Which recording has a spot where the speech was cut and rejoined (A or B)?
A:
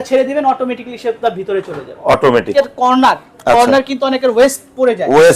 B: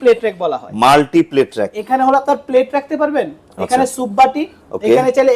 A